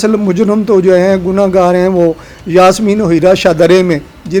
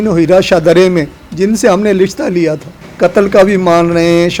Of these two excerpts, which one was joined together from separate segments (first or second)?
second